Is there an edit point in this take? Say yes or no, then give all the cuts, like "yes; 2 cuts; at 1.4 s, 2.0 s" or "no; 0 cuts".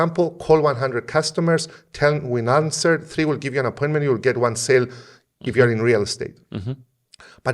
no; 0 cuts